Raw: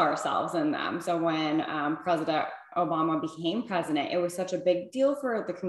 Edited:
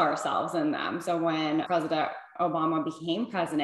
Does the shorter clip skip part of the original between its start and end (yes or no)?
yes